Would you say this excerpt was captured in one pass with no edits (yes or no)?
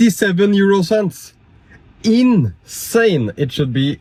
yes